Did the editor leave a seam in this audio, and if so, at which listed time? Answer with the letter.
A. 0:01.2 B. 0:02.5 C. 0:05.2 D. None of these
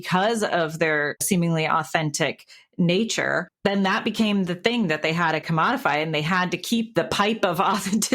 A